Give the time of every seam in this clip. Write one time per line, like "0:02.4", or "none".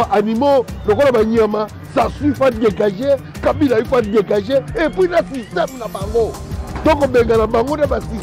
none